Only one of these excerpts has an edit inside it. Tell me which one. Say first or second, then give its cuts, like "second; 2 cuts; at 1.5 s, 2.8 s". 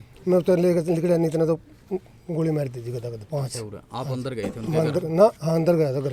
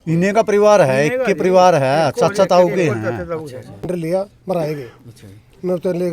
second; 1 cut; at 3.9 s